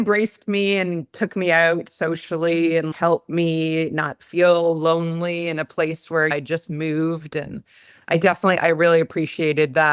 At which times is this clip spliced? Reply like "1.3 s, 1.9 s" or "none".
none